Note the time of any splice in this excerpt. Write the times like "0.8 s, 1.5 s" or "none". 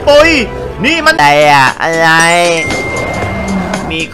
1.2 s